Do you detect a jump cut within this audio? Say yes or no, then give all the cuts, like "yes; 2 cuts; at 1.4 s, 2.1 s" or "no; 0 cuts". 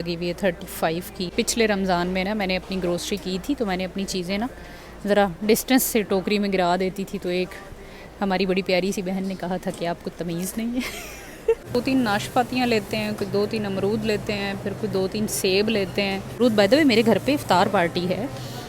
yes; 3 cuts; at 1.3 s, 11.6 s, 16.3 s